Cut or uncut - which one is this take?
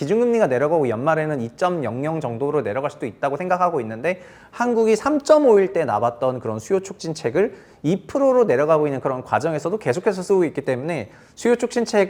uncut